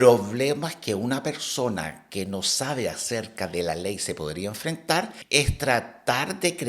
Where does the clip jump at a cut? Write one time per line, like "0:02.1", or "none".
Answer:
0:05.2